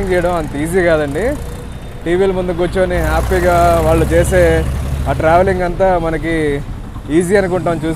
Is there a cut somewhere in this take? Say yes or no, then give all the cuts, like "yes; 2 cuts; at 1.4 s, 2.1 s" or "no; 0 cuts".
no; 0 cuts